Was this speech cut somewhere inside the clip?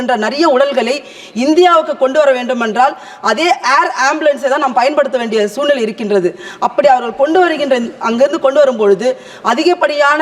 no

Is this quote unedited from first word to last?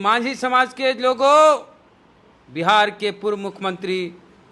yes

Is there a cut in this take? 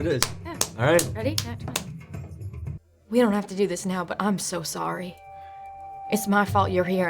yes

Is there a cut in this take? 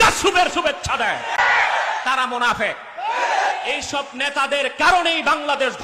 yes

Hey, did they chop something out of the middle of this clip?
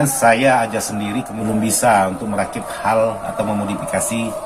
yes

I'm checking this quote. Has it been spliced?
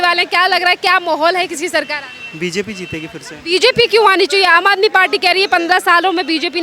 no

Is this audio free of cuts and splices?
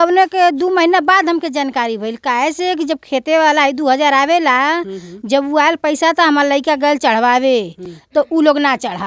yes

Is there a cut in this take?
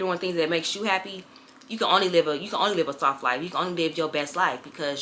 no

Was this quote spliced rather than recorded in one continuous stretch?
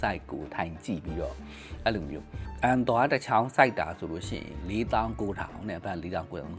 yes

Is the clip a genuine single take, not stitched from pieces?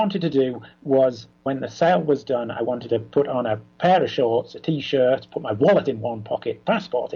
no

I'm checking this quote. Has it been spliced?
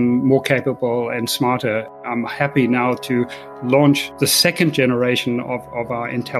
yes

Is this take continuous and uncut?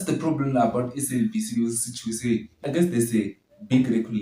no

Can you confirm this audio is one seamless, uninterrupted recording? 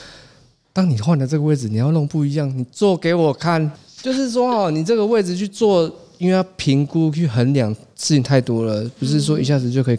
no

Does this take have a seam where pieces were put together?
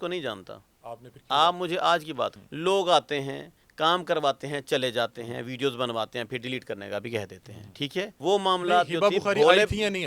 yes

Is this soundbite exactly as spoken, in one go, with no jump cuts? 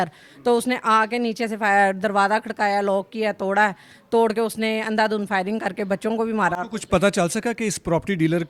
yes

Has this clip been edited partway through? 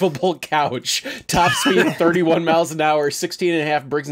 no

